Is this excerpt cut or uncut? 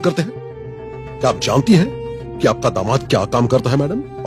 uncut